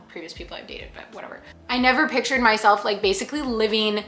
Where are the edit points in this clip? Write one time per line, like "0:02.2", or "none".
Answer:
none